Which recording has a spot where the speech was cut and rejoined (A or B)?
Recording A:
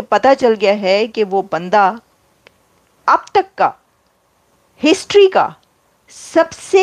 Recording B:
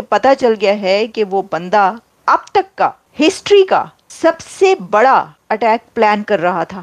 B